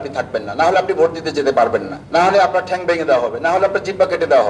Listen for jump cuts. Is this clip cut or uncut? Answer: cut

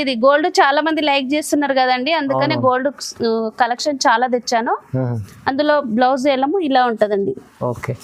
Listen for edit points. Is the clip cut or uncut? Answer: uncut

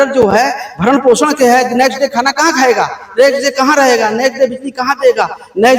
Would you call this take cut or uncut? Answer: uncut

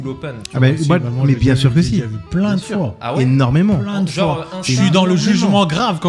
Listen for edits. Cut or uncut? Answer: uncut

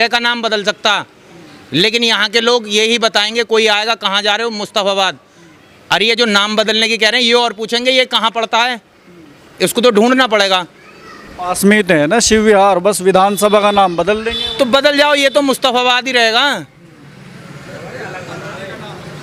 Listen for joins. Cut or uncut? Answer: uncut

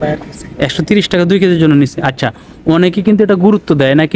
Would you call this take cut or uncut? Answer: uncut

